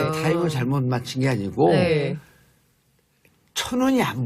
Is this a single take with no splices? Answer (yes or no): yes